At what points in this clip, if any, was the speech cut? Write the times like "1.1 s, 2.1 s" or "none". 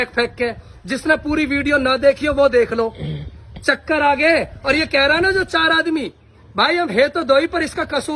none

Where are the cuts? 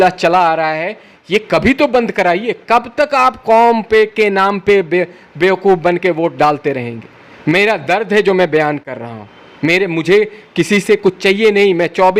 none

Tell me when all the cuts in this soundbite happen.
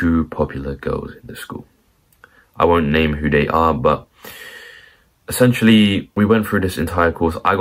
6.1 s

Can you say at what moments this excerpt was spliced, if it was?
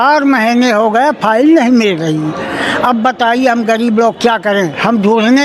none

